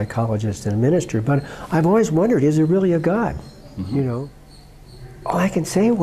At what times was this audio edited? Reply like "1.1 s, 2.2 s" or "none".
4.3 s